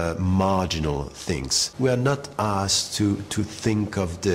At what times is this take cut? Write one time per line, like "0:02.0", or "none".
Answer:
0:01.6